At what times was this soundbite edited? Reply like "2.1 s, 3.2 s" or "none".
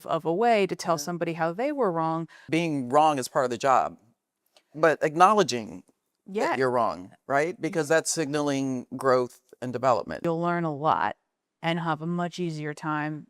2.4 s, 10.2 s